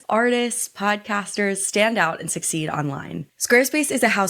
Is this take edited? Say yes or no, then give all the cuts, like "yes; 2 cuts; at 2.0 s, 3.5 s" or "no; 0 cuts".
yes; 1 cut; at 3.3 s